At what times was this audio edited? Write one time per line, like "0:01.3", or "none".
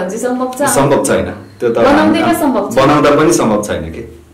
none